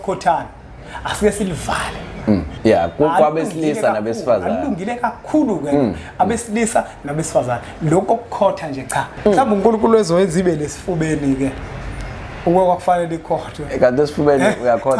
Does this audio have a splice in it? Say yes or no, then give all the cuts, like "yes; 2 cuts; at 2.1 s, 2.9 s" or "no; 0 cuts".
yes; 2 cuts; at 2.5 s, 9.1 s